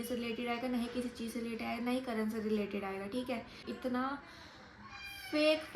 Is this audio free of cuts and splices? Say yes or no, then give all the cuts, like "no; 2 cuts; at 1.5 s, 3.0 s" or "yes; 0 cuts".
no; 1 cut; at 3.7 s